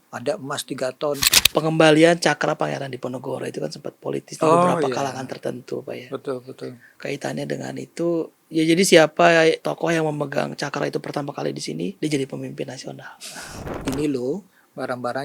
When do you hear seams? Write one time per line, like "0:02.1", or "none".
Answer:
0:01.3
0:09.6
0:12.0
0:13.7